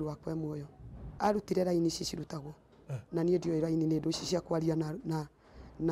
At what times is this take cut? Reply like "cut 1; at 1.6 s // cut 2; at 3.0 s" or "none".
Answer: cut 1; at 1.1 s